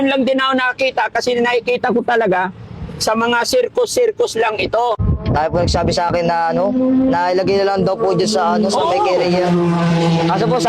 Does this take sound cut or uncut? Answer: cut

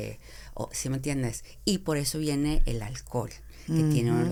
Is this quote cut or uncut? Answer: uncut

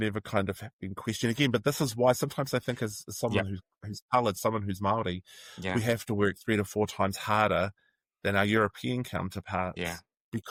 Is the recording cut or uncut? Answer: uncut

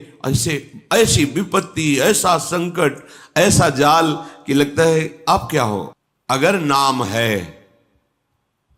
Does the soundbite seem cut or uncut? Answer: cut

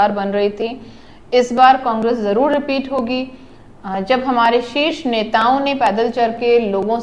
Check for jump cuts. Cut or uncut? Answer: uncut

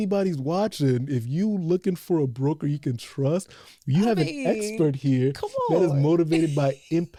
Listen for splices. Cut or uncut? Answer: uncut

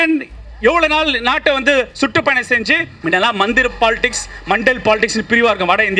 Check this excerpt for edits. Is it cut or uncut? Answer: cut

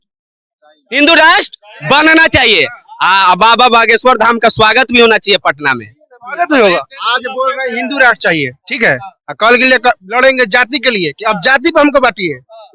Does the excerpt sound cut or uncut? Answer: uncut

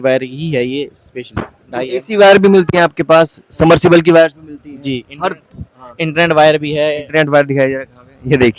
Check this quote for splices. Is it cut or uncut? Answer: uncut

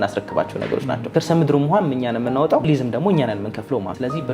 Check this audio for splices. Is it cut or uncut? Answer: cut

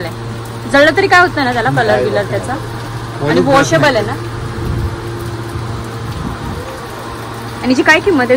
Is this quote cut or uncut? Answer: uncut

